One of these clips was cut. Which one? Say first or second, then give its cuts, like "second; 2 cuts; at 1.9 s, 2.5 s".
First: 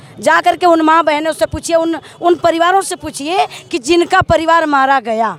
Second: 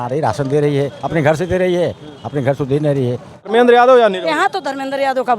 second; 1 cut; at 3.4 s